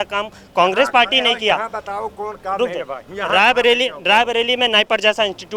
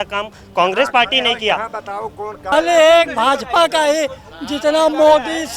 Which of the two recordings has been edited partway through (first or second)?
second